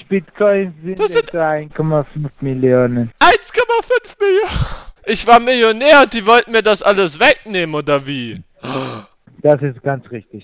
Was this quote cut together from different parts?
yes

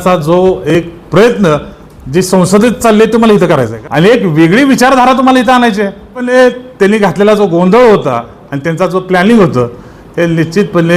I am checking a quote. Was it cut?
yes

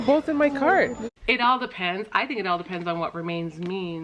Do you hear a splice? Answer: yes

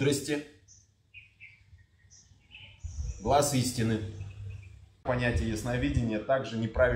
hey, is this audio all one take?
no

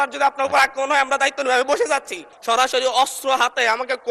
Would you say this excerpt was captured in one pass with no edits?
no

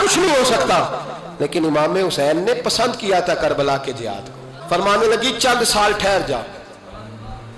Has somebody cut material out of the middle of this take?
yes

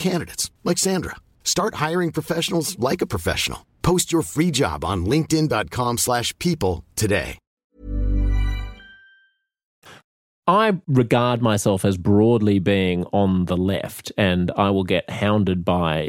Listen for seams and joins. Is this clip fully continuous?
yes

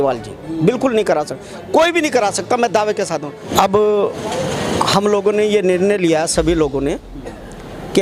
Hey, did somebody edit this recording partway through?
yes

